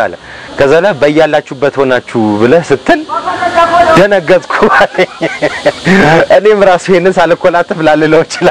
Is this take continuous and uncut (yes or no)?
yes